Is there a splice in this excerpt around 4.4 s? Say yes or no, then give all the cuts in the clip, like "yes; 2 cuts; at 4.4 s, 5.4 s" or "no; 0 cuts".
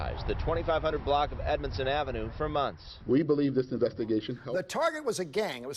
yes; 1 cut; at 4.4 s